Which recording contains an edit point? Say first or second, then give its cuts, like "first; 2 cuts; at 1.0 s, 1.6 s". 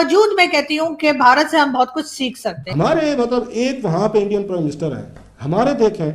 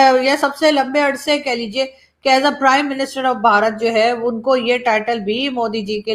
first; 1 cut; at 2.8 s